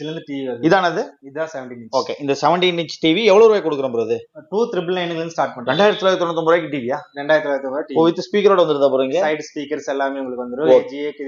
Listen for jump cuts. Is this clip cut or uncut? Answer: uncut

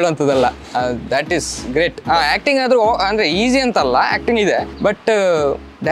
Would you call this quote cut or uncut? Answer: cut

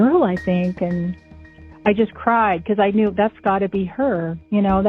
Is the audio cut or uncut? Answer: cut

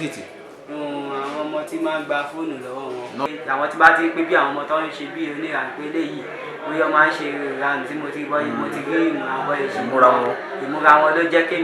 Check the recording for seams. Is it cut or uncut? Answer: cut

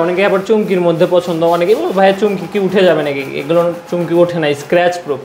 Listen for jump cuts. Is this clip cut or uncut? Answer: uncut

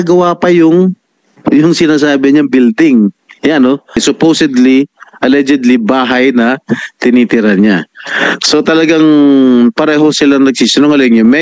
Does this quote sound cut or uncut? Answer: cut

